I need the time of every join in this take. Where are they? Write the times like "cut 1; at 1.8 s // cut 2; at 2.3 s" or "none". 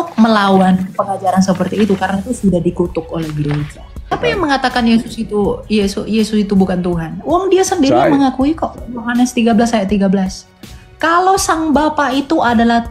cut 1; at 4.1 s